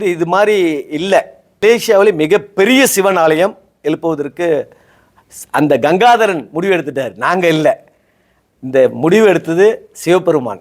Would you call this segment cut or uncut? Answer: cut